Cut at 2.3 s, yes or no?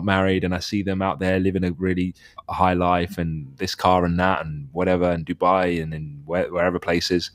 yes